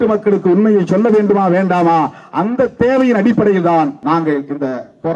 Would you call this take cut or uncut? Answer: cut